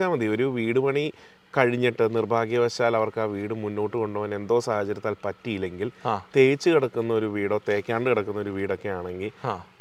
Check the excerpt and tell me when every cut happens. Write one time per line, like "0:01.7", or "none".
none